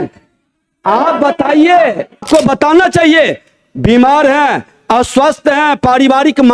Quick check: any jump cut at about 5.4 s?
no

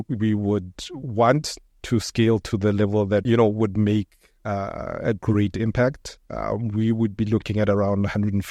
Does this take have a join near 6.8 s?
no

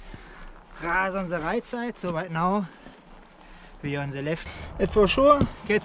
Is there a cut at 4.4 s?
yes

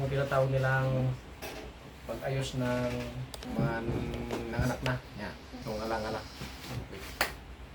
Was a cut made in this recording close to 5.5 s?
yes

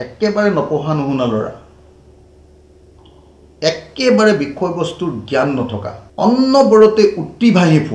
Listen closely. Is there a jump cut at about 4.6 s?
no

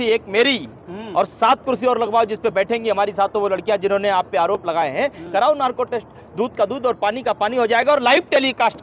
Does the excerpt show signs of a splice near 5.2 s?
no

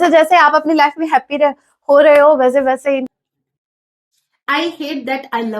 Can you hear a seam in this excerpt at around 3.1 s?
yes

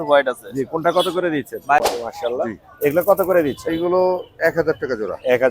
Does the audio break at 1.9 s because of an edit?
yes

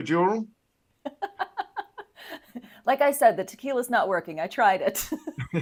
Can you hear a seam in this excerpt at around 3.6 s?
no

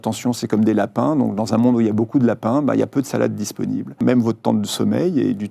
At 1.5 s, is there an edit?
no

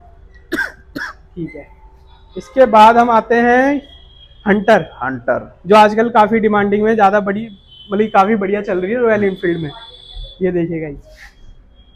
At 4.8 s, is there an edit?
no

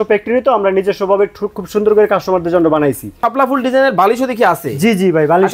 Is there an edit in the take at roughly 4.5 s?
no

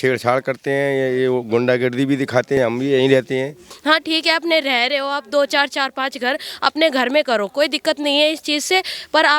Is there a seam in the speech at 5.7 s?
no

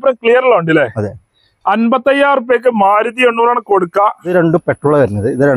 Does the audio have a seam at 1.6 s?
no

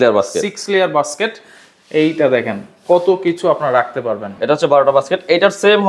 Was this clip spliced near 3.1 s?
no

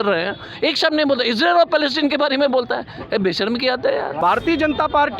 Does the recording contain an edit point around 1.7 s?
no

